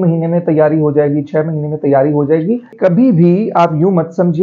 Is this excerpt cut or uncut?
cut